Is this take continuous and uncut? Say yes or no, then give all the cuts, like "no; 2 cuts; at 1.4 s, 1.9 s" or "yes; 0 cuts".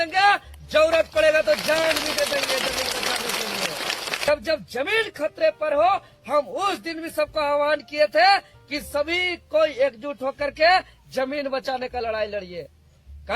no; 1 cut; at 4.3 s